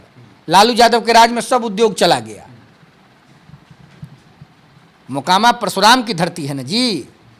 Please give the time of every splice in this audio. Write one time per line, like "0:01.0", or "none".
none